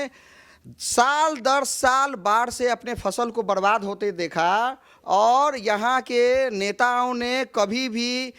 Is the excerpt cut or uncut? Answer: uncut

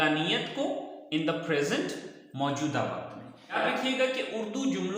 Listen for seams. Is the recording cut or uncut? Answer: cut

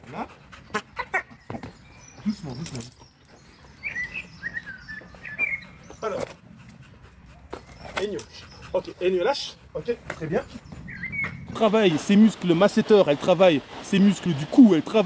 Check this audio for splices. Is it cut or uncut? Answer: cut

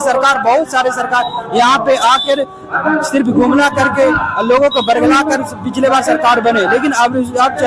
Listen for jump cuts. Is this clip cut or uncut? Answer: uncut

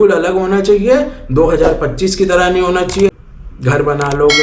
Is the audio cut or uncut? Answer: cut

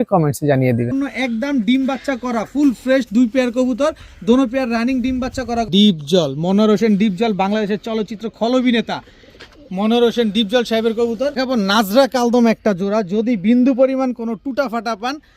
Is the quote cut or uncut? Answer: cut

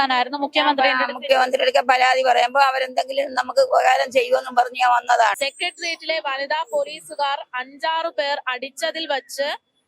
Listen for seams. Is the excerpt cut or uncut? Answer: cut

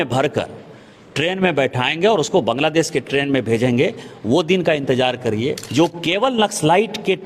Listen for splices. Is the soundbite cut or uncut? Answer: cut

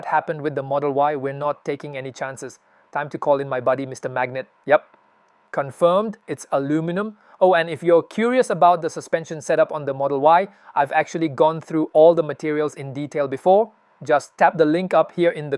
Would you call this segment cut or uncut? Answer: uncut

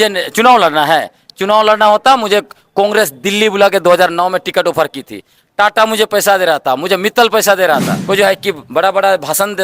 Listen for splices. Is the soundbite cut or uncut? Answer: cut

